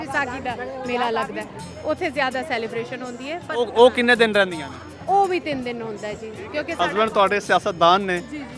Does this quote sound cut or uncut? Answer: cut